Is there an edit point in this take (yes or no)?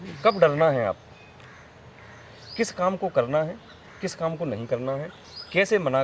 no